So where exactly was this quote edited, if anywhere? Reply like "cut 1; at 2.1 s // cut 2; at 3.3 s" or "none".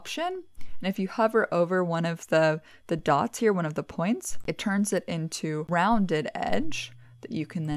cut 1; at 4.3 s // cut 2; at 5.7 s